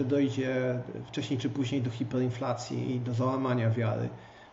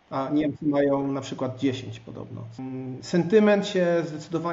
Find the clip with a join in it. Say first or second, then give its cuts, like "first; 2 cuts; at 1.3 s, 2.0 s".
second; 1 cut; at 2.6 s